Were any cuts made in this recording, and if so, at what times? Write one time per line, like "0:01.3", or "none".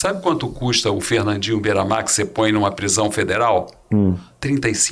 none